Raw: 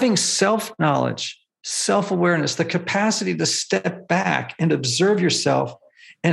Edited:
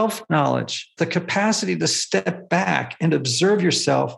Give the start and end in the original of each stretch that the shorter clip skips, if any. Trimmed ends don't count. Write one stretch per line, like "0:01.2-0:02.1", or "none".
0:01.4-0:02.5